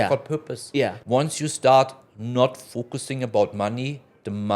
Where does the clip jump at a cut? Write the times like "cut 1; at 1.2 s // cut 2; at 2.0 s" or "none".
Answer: cut 1; at 1.0 s